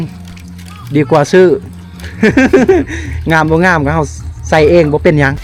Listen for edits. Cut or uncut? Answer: uncut